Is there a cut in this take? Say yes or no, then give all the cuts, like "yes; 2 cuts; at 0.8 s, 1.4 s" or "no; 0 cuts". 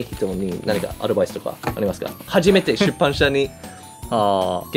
no; 0 cuts